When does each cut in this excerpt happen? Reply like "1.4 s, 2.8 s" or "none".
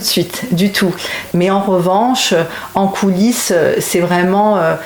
1.3 s